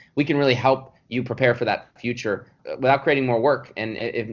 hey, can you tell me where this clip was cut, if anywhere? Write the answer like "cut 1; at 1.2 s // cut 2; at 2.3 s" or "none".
cut 1; at 2.6 s